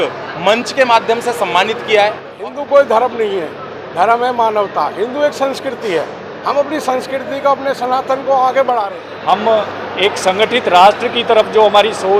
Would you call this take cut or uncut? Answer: cut